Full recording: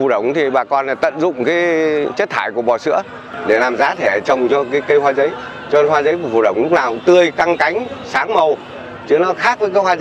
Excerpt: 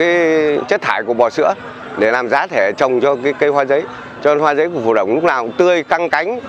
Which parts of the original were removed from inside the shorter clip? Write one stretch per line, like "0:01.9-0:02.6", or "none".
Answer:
none